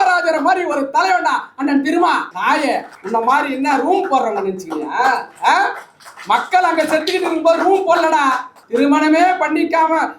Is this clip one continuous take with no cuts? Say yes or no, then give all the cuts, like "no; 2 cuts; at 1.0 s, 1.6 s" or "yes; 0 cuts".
no; 2 cuts; at 2.5 s, 8.5 s